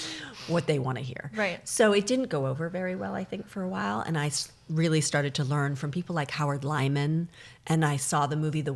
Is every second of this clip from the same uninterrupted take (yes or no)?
yes